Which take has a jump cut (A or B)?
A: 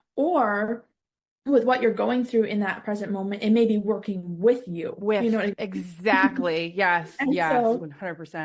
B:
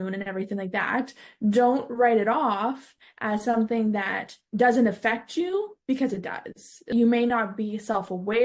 B